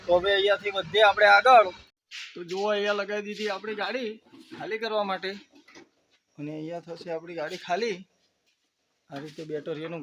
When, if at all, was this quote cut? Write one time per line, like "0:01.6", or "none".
0:01.9